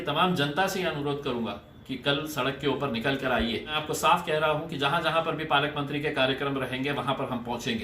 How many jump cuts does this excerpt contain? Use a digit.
1